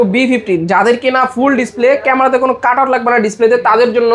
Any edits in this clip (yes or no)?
no